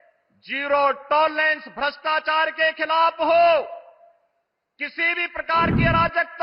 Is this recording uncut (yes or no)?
yes